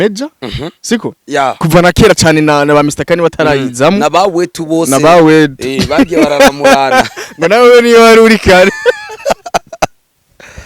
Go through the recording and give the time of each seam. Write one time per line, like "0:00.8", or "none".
none